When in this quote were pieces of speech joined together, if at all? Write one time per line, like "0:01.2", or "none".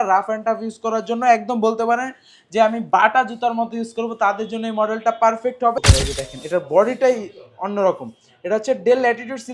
0:05.8